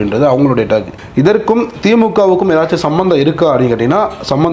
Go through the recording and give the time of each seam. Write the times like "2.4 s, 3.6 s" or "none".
1.0 s